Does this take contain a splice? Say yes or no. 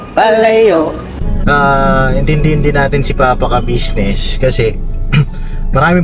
yes